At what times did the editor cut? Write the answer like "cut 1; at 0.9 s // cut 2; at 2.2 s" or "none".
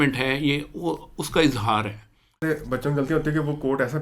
cut 1; at 2.4 s